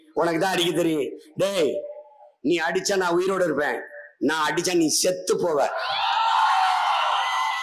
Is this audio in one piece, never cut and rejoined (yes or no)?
yes